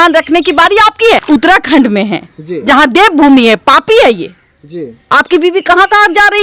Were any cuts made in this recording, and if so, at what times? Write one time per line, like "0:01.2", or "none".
0:01.2
0:04.9